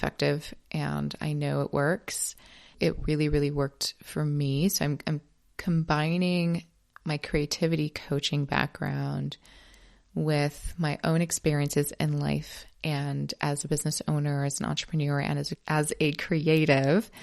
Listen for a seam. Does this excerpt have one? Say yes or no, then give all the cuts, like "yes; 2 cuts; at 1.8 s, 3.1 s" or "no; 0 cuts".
no; 0 cuts